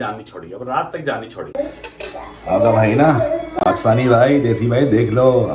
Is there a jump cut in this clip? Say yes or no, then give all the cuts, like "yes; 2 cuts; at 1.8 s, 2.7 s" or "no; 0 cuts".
yes; 1 cut; at 1.5 s